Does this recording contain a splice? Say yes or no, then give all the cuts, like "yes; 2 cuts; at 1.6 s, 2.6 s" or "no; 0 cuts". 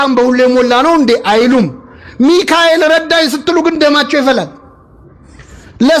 no; 0 cuts